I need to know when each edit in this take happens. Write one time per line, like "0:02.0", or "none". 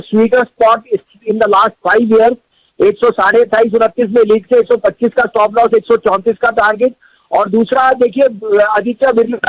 none

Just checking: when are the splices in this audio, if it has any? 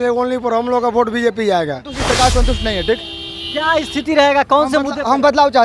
0:01.9

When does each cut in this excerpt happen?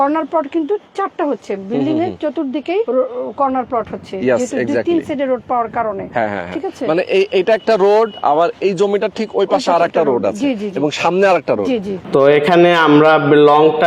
0:02.9
0:11.9

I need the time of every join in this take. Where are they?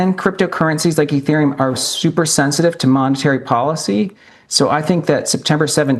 none

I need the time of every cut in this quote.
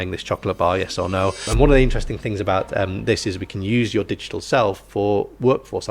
0:01.5

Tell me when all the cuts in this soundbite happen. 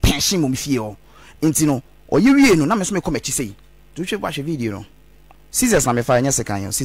none

